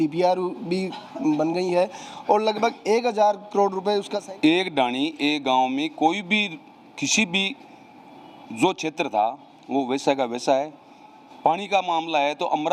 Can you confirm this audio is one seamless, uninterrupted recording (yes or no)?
no